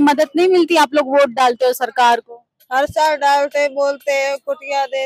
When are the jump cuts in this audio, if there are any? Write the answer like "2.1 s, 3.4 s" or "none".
none